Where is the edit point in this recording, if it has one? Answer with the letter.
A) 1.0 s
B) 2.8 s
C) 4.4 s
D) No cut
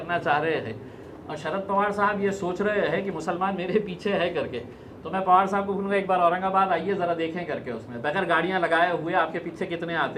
D